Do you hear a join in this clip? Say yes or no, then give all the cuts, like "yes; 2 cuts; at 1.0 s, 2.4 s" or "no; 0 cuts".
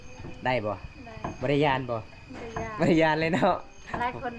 no; 0 cuts